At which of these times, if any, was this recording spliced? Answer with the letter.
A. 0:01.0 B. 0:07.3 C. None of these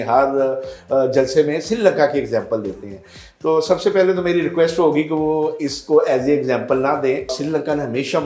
B